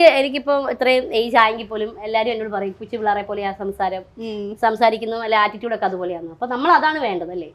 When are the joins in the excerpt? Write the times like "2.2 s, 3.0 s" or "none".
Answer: none